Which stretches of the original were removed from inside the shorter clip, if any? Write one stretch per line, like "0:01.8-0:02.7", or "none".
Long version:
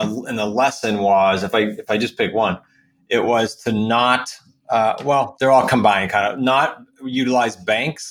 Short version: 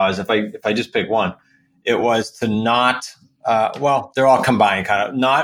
none